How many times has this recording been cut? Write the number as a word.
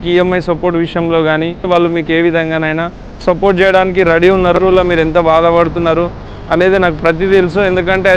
two